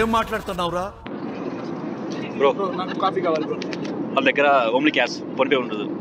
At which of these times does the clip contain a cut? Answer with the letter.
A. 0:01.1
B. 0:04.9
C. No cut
A